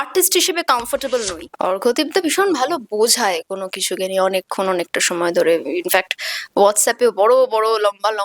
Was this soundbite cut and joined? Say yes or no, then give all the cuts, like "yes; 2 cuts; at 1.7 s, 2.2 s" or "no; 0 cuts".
yes; 1 cut; at 1.4 s